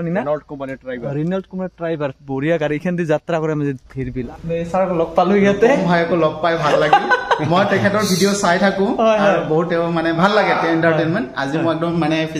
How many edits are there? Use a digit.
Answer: 1